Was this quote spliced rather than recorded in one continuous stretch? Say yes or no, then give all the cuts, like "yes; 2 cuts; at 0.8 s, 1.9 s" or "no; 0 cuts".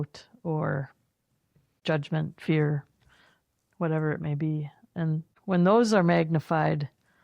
yes; 2 cuts; at 1.7 s, 5.3 s